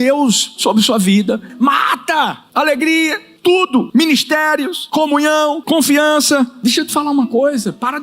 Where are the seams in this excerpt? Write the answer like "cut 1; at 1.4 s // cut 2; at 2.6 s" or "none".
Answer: cut 1; at 1.5 s // cut 2; at 2.4 s // cut 3; at 3.6 s // cut 4; at 4.8 s // cut 5; at 5.6 s // cut 6; at 6.5 s